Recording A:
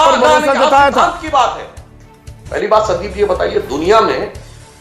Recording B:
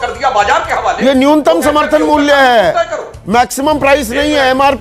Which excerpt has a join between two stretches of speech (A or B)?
A